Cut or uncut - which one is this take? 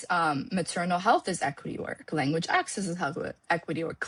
uncut